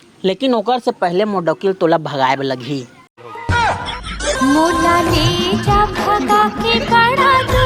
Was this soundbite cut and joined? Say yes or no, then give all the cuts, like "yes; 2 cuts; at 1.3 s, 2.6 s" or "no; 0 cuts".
no; 0 cuts